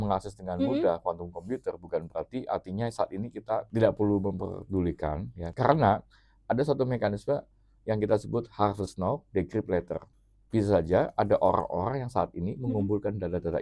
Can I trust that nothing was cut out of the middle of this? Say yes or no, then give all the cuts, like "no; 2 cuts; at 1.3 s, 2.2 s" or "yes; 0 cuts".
no; 3 cuts; at 3.7 s, 5.5 s, 10.1 s